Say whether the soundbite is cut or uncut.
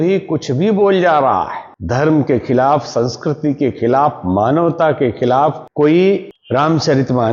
uncut